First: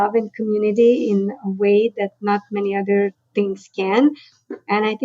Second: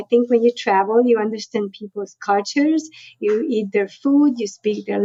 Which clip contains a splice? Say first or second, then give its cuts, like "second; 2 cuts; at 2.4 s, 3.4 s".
first; 1 cut; at 3.2 s